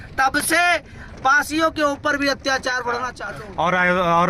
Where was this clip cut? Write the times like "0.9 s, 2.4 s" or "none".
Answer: 3.1 s